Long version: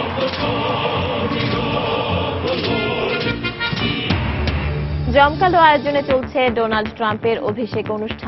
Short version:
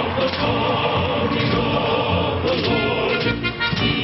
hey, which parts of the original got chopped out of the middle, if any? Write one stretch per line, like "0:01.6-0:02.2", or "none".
none